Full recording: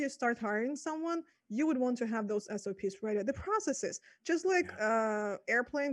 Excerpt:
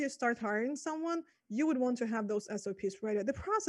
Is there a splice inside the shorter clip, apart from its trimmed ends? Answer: no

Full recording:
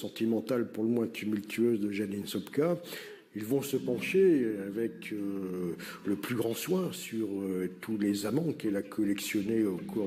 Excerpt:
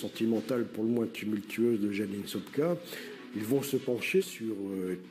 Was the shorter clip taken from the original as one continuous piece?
no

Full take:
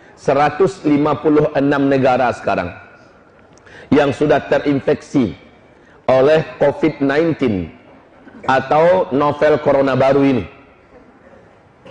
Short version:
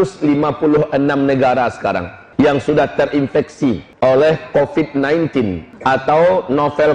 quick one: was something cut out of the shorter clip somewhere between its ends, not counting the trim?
yes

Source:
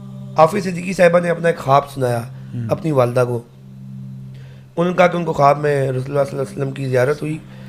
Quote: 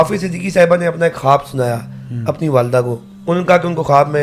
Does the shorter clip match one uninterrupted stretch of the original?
no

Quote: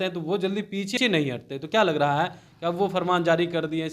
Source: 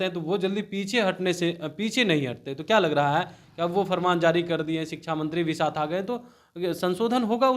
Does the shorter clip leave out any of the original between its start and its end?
yes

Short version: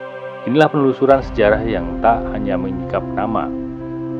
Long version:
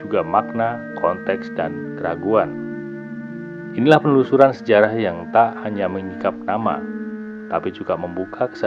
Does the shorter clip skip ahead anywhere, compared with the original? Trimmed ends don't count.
no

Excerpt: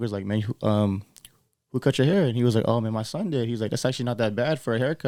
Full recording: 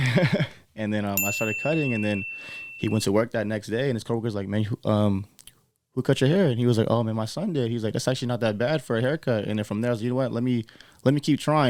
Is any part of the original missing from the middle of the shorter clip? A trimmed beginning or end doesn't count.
no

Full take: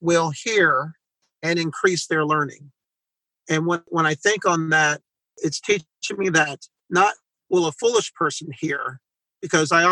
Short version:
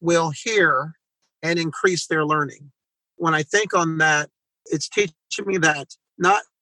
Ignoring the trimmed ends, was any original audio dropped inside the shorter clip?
yes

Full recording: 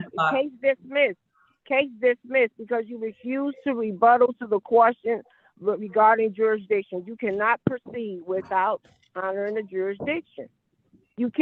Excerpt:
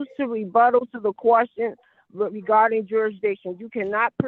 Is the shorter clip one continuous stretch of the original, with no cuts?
yes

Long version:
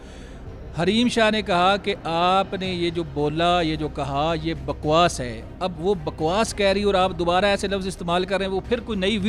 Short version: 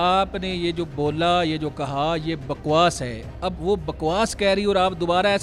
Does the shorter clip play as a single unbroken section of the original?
yes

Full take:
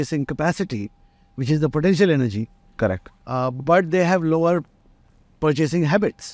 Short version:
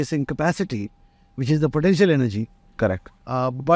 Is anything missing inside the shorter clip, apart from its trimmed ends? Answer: no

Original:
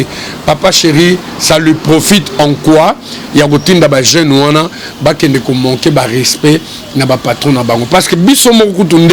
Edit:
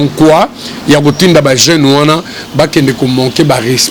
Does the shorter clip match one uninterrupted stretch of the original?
yes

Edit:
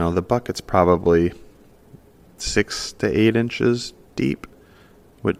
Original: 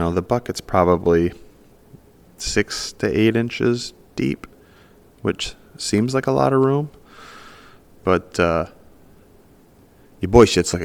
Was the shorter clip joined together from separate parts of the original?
no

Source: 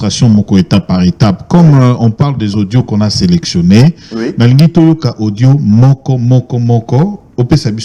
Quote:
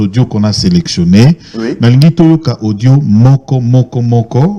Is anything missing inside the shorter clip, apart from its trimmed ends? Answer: no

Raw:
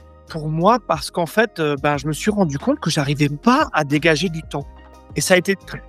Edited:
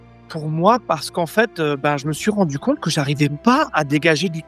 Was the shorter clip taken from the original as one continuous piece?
yes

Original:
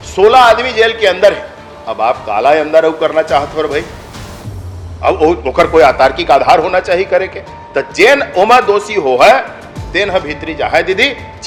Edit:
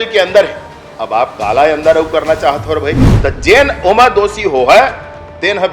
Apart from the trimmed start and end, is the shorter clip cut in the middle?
yes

